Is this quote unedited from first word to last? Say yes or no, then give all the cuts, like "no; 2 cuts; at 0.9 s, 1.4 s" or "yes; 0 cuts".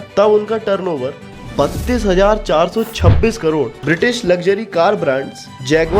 no; 1 cut; at 3.8 s